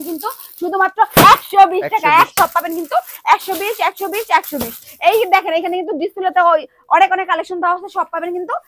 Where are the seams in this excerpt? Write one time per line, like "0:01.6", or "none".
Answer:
0:02.3